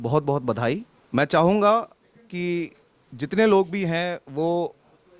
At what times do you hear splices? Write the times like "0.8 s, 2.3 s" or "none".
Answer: 0.9 s